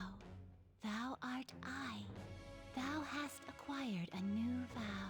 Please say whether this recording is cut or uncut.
uncut